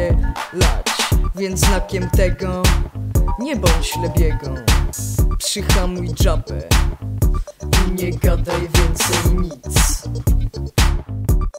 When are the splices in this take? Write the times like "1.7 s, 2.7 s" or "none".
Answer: 9.6 s